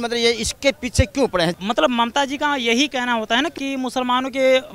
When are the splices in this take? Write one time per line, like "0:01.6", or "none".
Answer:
0:01.5
0:03.6